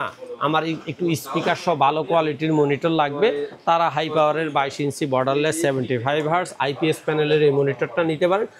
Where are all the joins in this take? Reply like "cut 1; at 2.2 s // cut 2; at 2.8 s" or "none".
none